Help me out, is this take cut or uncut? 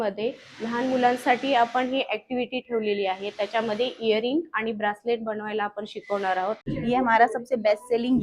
cut